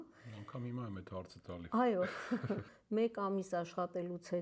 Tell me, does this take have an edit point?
yes; 1 cut; at 2.7 s

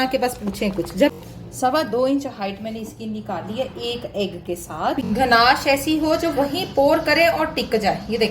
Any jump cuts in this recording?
yes; 2 cuts; at 1.1 s, 5.0 s

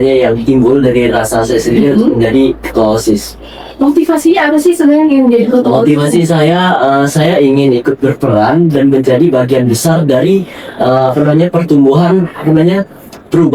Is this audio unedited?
yes; 0 cuts

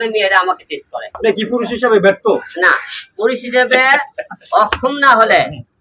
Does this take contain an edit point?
yes; 1 cut; at 1.1 s

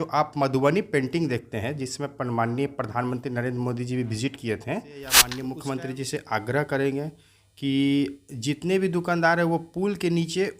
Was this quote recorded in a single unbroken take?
no; 1 cut; at 5.2 s

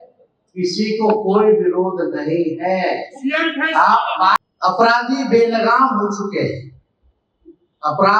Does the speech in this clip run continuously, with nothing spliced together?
no; 1 cut; at 4.4 s

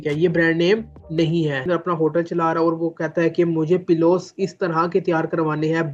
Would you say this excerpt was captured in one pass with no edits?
no; 1 cut; at 1.7 s

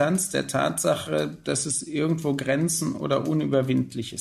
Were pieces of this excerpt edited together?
no; 0 cuts

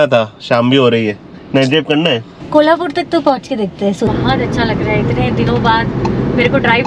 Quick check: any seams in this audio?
yes; 2 cuts; at 2.3 s, 4.1 s

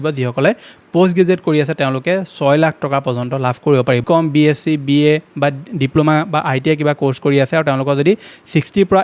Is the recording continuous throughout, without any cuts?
no; 1 cut; at 4.0 s

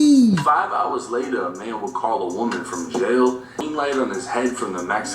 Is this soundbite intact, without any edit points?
no; 1 cut; at 3.7 s

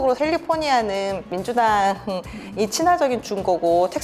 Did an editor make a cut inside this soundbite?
yes; 1 cut; at 1.3 s

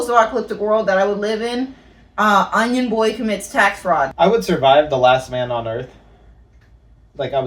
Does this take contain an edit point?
no; 0 cuts

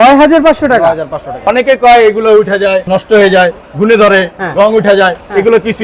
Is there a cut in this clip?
yes; 2 cuts; at 1.4 s, 2.9 s

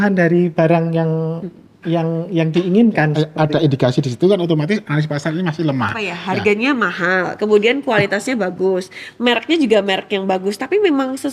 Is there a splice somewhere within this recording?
yes; 2 cuts; at 3.1 s, 6.1 s

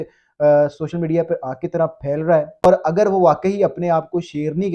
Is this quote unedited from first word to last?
no; 1 cut; at 2.7 s

